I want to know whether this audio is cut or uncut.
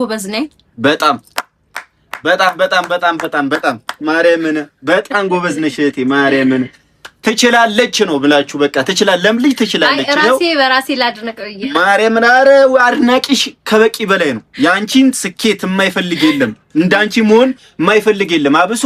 uncut